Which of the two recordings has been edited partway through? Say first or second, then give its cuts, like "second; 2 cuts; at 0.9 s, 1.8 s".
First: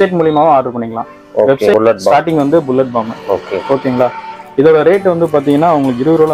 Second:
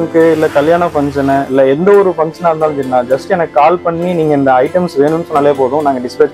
first; 1 cut; at 1.7 s